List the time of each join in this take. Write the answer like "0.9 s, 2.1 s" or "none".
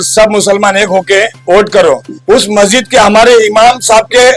2.1 s